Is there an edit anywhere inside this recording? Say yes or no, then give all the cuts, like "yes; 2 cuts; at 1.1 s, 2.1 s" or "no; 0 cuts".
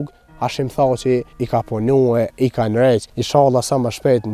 yes; 2 cuts; at 1.3 s, 3.1 s